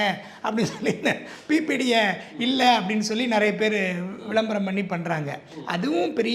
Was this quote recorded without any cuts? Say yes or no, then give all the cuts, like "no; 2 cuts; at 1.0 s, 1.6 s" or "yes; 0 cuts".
yes; 0 cuts